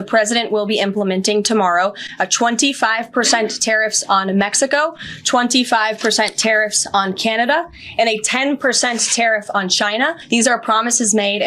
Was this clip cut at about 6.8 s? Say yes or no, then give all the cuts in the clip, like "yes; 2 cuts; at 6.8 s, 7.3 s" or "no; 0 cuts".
no; 1 cut; at 10.2 s